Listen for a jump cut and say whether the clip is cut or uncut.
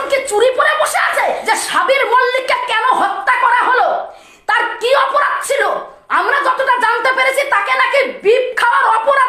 cut